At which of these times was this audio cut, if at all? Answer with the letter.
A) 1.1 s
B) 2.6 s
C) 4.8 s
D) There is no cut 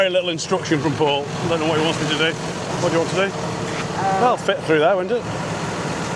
D